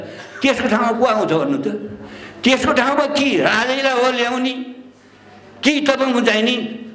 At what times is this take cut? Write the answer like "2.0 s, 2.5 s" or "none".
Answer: none